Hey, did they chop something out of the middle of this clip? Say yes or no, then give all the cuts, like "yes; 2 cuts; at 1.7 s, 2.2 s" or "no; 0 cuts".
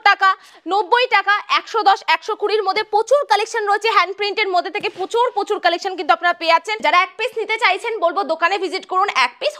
yes; 1 cut; at 6.8 s